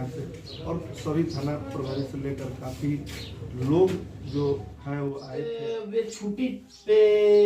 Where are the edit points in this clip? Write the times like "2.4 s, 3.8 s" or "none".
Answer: 5.5 s